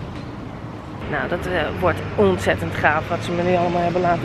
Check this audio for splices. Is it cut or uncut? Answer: cut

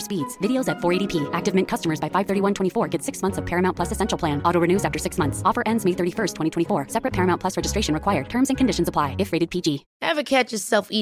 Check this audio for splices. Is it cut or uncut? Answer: cut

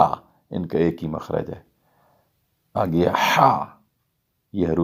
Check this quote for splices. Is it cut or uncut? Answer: uncut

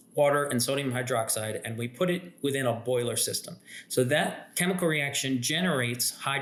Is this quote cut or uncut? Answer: uncut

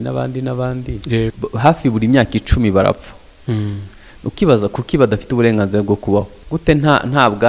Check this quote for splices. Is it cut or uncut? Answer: cut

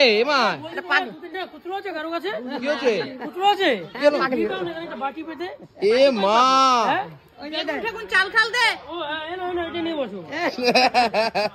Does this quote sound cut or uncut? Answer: uncut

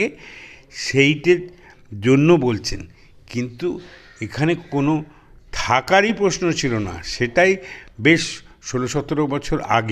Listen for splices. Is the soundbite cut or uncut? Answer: uncut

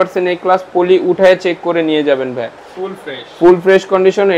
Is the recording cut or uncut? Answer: uncut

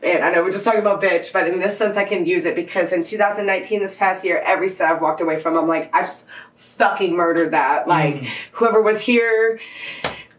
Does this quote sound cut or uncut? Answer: uncut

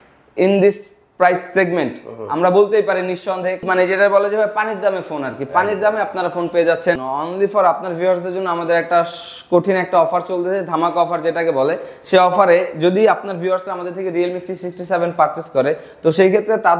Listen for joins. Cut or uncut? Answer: cut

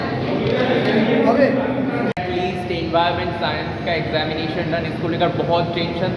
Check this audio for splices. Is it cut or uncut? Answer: cut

